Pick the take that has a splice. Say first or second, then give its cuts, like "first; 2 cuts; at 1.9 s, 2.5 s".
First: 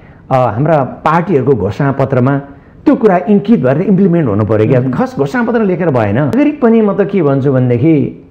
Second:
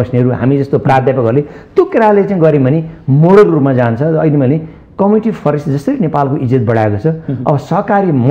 first; 1 cut; at 6.3 s